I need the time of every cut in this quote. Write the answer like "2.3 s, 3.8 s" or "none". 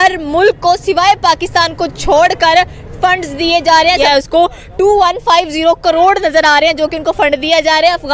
4.0 s